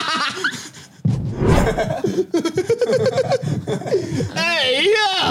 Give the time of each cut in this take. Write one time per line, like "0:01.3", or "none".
0:01.4